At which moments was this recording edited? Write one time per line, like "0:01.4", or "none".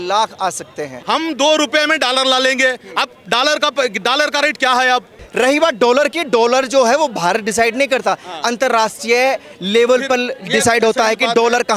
0:01.0
0:05.2